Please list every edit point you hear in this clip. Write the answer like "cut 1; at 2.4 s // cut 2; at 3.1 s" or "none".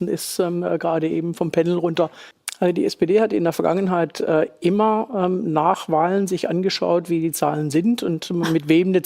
cut 1; at 2.3 s